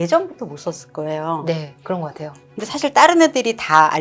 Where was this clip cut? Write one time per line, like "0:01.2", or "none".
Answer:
0:02.0